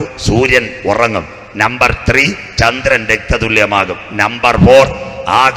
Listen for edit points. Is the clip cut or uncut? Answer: uncut